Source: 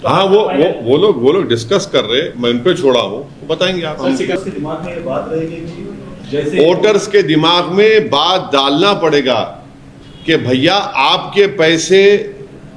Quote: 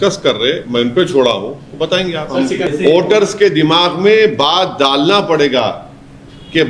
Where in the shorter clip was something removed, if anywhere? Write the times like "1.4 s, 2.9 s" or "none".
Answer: 2.7 s